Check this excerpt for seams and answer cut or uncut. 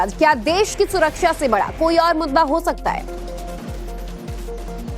cut